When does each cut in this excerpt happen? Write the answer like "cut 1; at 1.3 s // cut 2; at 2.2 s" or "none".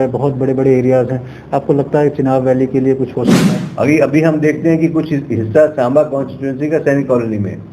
cut 1; at 3.6 s